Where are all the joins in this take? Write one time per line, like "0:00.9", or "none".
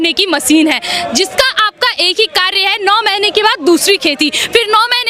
none